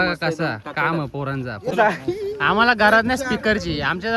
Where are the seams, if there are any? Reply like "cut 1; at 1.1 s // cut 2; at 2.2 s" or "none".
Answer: cut 1; at 1.7 s